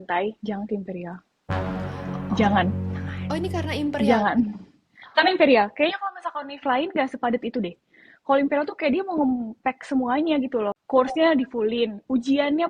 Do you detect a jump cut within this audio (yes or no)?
yes